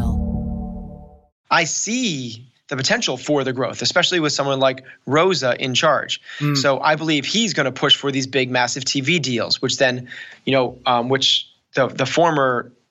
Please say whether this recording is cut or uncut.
cut